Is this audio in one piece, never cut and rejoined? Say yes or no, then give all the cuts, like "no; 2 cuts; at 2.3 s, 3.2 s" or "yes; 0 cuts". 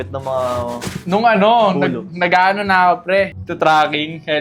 no; 1 cut; at 3.4 s